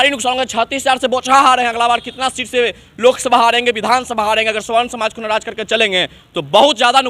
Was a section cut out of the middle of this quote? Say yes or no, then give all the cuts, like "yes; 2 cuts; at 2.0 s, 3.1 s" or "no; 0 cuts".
no; 0 cuts